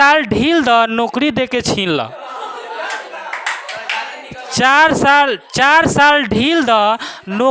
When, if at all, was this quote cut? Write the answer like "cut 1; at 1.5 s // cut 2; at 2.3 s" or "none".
cut 1; at 4.5 s